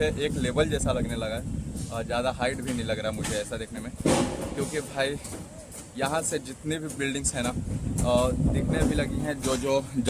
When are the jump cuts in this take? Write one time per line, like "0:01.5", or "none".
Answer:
none